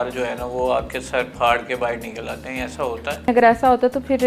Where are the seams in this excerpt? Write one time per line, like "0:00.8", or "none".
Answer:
0:03.3

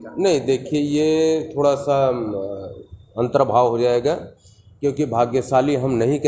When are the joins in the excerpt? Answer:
none

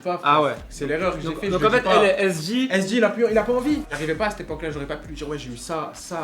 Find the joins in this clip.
0:03.9

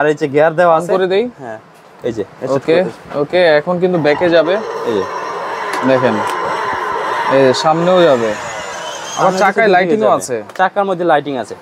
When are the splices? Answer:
none

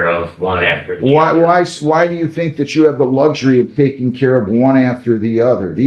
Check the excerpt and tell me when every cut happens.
none

